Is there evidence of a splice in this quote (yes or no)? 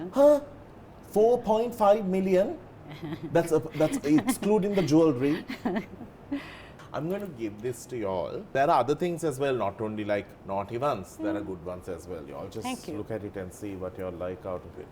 yes